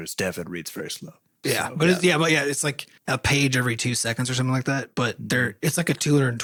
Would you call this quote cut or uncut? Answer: uncut